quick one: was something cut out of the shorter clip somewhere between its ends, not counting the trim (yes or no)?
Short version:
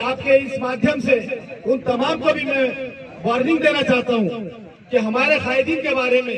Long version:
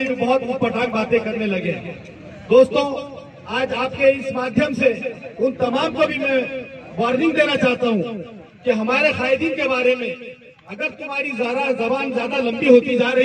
no